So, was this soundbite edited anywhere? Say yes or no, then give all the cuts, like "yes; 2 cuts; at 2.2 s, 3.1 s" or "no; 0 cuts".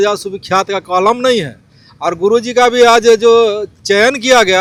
no; 0 cuts